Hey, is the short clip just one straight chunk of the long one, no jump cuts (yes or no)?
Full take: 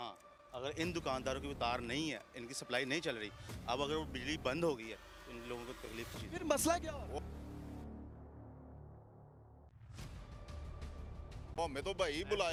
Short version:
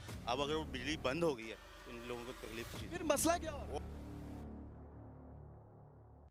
yes